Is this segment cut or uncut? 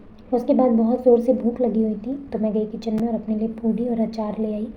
uncut